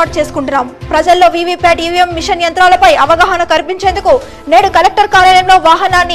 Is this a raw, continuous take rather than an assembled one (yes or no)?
yes